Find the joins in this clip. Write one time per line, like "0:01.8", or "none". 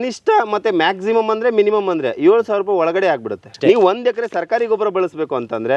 0:03.5